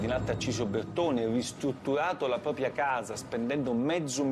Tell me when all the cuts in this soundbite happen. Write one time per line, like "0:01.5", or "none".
none